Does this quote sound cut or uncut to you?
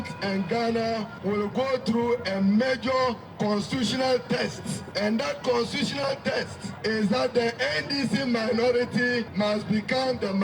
cut